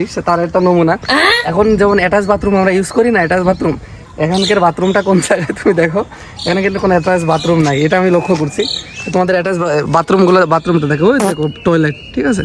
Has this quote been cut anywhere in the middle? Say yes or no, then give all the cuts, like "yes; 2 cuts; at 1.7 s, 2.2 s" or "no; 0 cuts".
no; 0 cuts